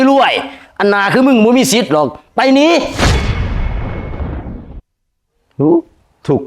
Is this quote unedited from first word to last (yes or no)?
yes